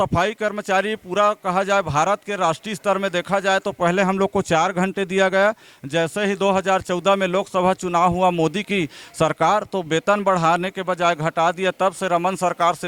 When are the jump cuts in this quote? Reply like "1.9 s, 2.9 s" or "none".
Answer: none